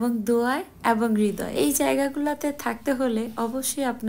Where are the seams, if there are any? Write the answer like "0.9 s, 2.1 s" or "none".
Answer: 1.5 s